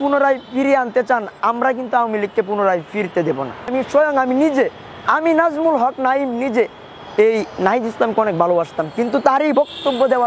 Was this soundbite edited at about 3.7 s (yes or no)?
yes